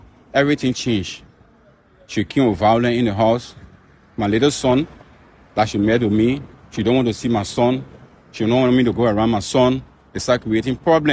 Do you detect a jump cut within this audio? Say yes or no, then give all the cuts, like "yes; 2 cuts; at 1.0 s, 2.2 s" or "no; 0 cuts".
no; 0 cuts